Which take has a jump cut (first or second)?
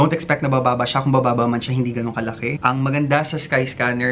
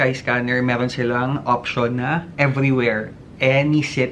first